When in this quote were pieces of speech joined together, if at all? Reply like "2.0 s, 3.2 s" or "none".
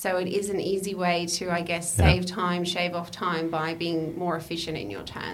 none